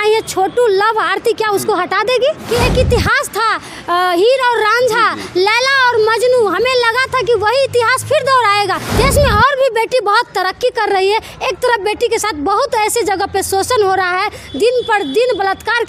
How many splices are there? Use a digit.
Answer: 2